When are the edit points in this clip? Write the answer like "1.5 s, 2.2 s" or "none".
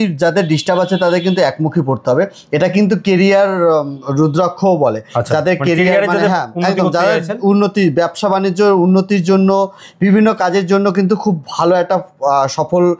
none